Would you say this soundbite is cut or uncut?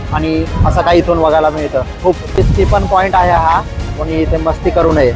cut